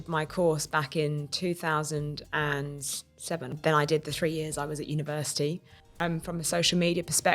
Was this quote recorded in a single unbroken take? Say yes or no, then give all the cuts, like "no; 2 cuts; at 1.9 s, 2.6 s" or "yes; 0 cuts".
no; 1 cut; at 6.0 s